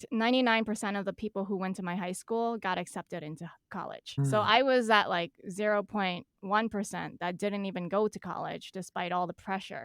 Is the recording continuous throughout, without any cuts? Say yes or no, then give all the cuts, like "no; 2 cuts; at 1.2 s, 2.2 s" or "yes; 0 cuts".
no; 1 cut; at 4.2 s